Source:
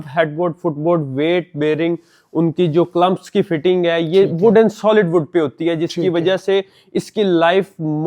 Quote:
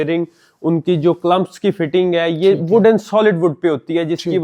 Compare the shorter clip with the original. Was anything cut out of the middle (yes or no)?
no